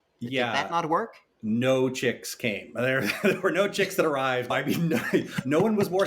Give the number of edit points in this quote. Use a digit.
1